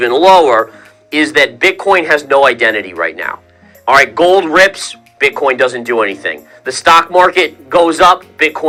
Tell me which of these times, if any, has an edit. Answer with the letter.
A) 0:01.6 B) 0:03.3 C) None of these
C